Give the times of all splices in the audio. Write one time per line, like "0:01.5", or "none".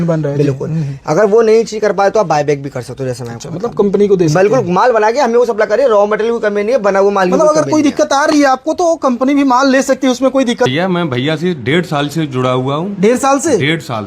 0:10.7